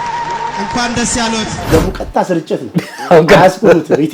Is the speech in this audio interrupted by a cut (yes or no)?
yes